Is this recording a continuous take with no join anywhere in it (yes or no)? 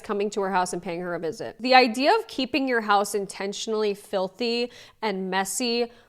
no